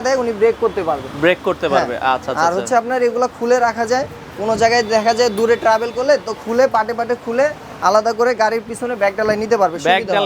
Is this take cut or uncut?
uncut